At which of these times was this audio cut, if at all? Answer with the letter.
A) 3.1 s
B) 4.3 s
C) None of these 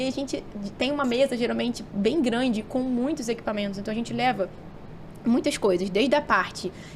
C